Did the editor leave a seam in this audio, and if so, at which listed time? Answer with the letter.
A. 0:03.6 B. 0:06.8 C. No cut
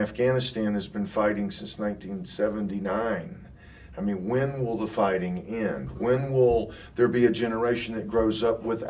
C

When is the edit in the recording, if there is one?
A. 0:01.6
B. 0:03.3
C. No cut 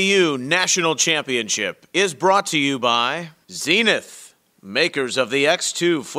B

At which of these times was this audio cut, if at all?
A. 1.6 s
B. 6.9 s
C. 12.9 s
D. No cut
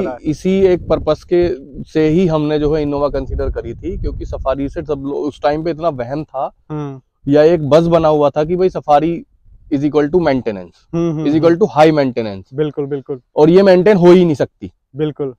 D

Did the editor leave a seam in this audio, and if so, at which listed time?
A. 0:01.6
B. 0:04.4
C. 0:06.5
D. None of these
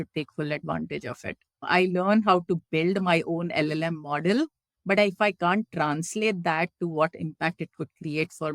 A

